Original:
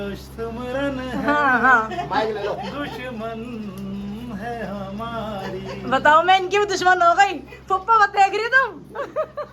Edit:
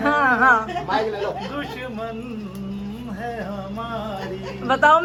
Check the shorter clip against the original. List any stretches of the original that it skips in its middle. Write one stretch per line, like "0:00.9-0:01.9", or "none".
none